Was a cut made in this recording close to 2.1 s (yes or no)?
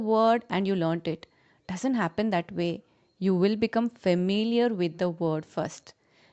no